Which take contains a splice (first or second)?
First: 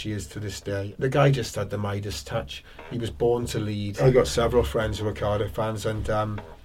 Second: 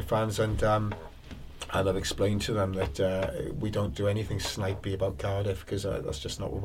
first